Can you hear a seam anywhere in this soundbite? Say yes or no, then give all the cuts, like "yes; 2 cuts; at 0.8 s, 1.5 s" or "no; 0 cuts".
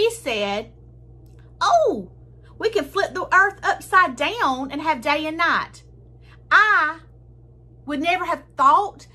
no; 0 cuts